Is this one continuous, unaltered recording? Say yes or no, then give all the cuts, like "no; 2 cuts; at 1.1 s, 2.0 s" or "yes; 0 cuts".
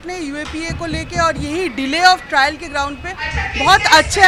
yes; 0 cuts